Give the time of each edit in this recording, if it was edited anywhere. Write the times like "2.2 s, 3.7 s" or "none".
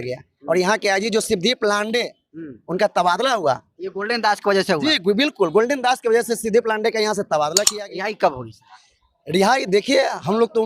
7.7 s